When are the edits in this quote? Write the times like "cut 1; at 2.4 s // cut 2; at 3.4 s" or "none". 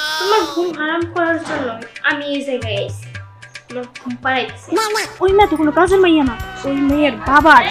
cut 1; at 5.1 s

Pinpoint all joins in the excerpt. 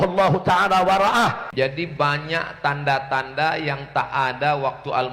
cut 1; at 1.4 s

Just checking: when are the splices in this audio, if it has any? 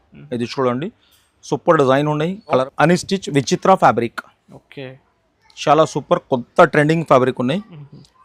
cut 1; at 2.5 s

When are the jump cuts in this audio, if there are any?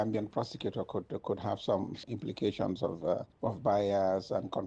none

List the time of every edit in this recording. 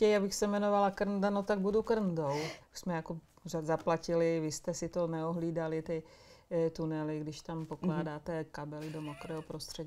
cut 1; at 2.5 s

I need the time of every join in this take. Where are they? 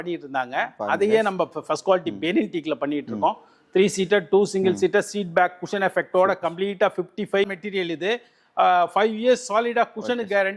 cut 1; at 7.5 s

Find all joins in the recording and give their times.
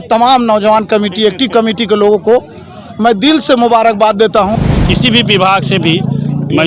cut 1; at 4.6 s

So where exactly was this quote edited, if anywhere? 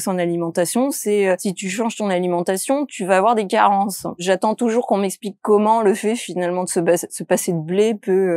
cut 1; at 1.5 s // cut 2; at 4.2 s

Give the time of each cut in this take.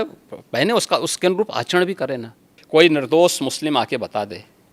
cut 1; at 2.5 s

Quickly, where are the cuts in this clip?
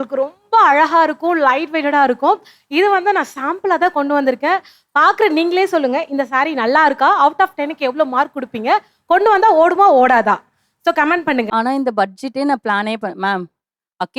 cut 1; at 11.5 s

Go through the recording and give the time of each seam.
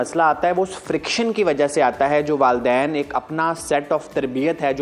none

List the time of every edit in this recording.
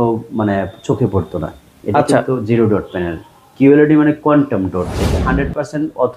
cut 1; at 5.2 s

